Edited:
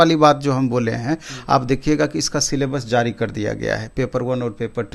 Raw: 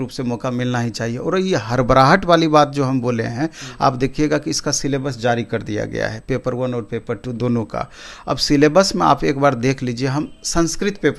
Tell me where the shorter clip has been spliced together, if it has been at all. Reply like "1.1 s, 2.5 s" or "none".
none